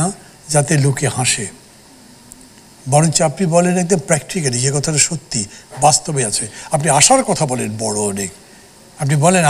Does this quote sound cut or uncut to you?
uncut